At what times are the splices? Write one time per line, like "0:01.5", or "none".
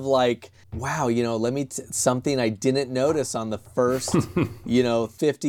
none